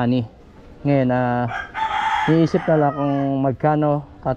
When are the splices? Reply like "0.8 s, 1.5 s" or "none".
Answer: none